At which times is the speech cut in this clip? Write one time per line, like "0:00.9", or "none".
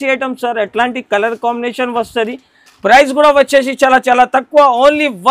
none